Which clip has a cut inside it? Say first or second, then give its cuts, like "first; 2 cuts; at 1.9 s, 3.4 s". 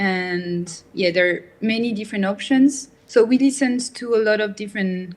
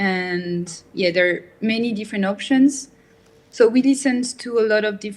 first; 1 cut; at 2.9 s